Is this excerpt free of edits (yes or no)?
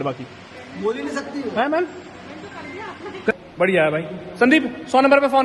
no